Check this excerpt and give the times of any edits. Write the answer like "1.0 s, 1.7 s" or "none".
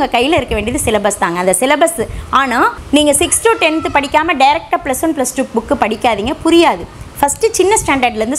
2.8 s